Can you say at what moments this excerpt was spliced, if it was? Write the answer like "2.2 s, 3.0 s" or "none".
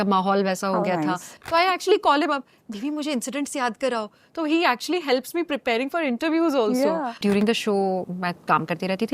1.3 s, 7.2 s